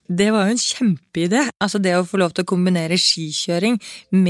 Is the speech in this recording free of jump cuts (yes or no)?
no